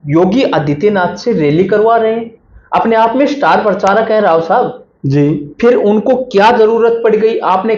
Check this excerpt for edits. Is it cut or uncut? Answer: uncut